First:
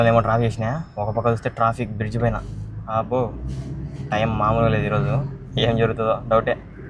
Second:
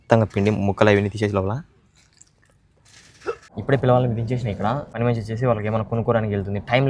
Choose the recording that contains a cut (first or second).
second